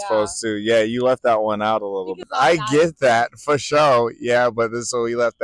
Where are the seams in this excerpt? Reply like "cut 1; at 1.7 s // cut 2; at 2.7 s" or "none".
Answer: cut 1; at 2.2 s